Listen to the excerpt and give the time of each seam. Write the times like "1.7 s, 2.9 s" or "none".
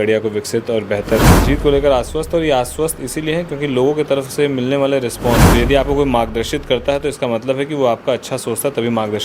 1.3 s, 5.5 s